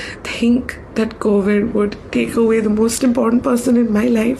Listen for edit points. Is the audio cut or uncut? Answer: uncut